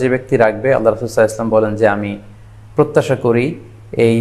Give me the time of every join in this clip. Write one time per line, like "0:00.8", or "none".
none